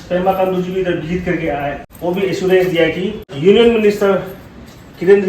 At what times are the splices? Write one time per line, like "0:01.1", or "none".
0:01.9
0:03.3